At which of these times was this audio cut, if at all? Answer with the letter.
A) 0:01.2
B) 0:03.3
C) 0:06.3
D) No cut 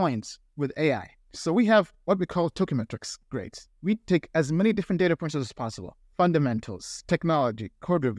D